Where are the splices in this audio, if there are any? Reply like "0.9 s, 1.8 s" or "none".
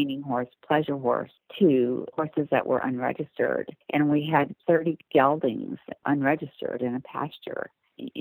1.4 s, 2.1 s, 3.8 s, 4.6 s, 6.0 s